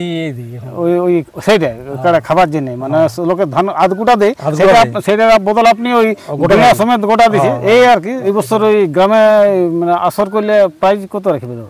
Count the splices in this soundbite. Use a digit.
1